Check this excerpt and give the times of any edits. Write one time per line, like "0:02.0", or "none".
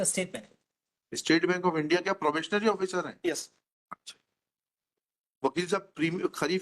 0:04.9